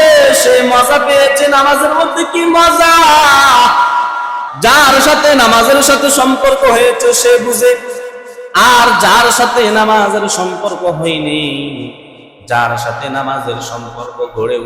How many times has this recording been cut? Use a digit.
1